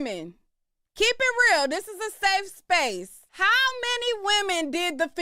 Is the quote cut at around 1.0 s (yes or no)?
no